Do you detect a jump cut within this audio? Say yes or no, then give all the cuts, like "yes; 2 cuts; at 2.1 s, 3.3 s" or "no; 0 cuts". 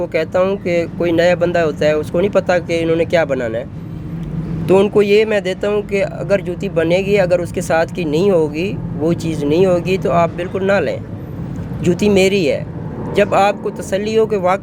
no; 0 cuts